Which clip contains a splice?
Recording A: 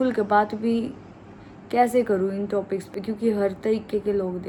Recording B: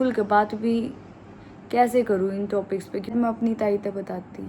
B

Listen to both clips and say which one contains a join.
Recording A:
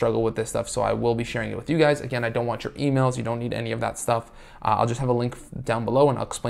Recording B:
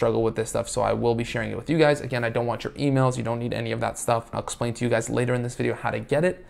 B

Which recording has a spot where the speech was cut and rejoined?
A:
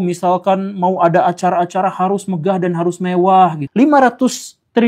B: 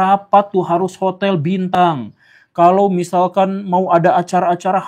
A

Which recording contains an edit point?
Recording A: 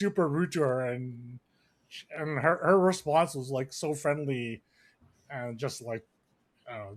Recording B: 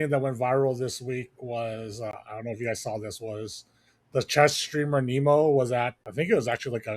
B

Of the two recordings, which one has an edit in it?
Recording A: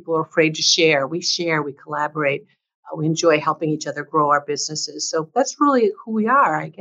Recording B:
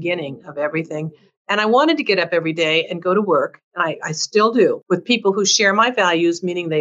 B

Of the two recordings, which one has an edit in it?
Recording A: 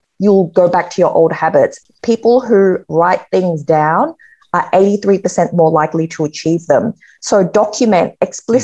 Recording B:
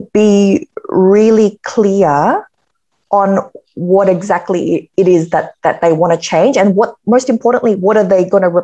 A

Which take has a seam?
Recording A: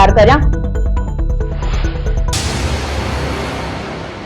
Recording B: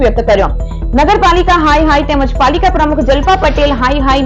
A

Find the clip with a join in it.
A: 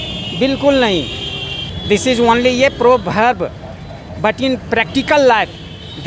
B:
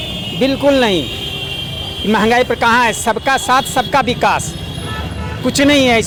A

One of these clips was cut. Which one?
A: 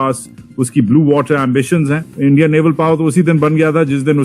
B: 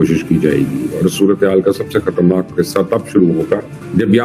A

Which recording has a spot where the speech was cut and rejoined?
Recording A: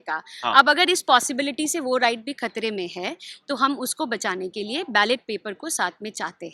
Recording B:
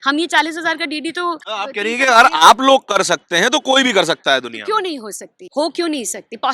B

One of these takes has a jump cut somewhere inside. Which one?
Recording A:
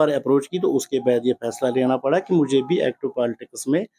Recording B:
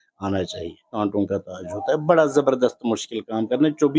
B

